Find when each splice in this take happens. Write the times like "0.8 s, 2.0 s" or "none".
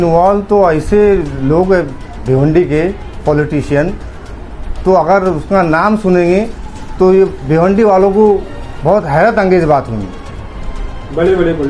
none